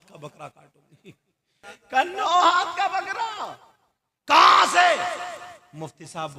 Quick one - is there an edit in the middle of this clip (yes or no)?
yes